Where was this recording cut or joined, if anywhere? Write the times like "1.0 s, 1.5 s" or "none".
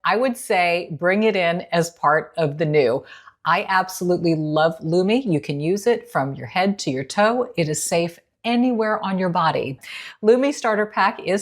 9.8 s